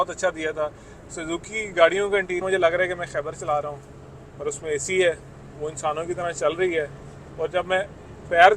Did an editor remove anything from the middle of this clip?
yes; 1 cut; at 2.4 s

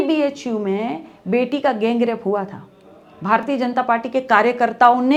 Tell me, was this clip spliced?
no; 0 cuts

